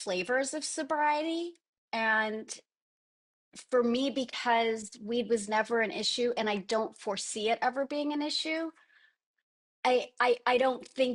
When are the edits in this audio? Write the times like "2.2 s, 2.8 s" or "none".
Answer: none